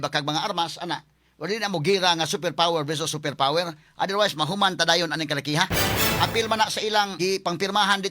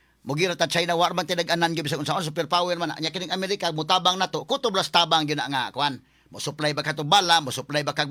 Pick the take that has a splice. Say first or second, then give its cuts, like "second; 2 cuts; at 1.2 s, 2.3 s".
first; 1 cut; at 7.1 s